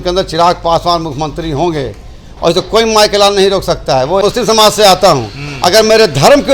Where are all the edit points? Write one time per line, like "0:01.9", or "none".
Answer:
0:04.2